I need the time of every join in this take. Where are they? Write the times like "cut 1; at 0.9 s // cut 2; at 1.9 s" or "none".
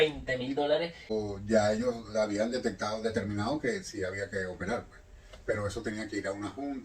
cut 1; at 1.0 s

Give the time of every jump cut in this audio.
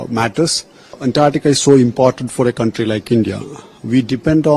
cut 1; at 1.0 s

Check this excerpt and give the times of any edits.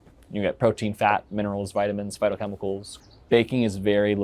cut 1; at 2.9 s

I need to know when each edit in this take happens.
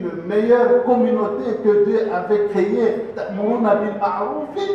none

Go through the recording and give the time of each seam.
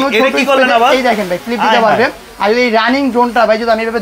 none

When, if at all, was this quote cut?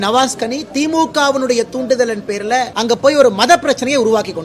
cut 1; at 2.7 s

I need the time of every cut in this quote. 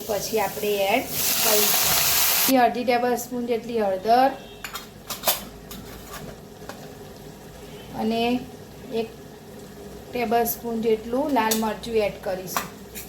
cut 1; at 2.5 s

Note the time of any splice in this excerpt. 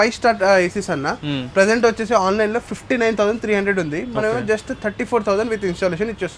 none

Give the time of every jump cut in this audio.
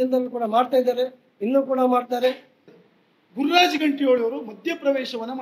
cut 1; at 2.7 s

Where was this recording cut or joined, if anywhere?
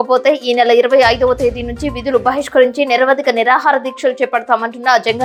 none

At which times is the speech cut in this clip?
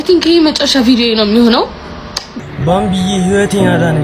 cut 1; at 2.2 s

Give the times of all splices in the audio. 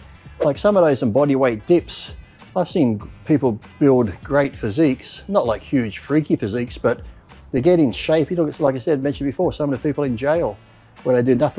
none

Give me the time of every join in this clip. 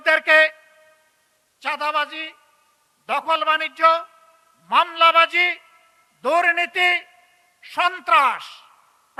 none

